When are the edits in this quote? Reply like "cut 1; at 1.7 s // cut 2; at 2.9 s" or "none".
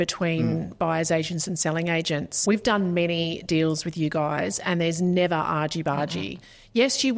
cut 1; at 2.3 s

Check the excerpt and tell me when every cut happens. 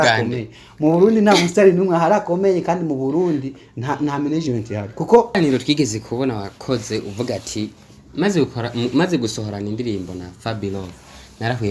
cut 1; at 5.4 s

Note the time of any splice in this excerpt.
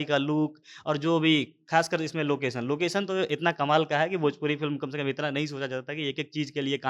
none

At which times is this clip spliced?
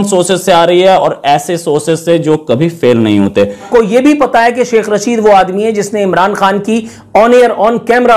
cut 1; at 3.7 s

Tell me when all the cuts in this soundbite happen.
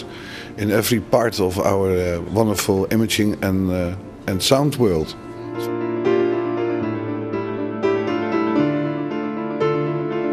cut 1; at 5.4 s

